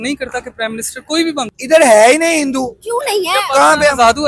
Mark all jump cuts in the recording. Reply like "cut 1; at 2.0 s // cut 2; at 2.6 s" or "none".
cut 1; at 1.6 s